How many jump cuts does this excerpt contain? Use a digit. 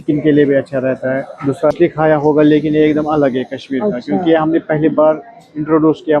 1